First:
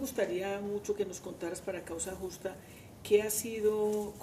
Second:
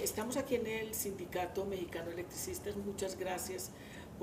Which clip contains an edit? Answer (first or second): first